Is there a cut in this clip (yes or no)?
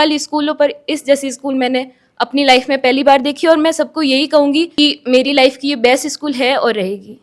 no